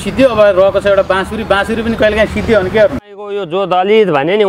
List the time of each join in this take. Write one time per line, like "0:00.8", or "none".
0:03.5